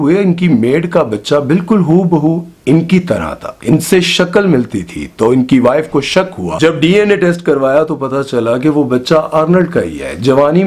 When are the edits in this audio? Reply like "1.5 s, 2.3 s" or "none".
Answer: none